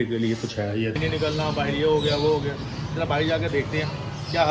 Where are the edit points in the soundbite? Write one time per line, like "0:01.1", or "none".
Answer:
0:01.0